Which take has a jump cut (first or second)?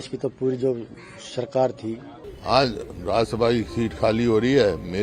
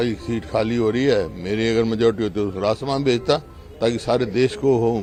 first